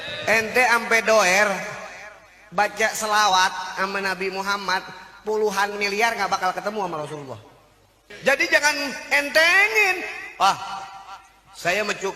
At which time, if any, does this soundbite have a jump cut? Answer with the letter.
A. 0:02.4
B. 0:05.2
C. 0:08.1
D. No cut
C